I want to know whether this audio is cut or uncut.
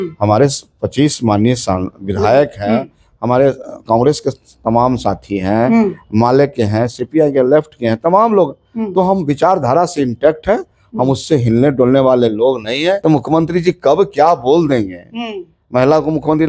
cut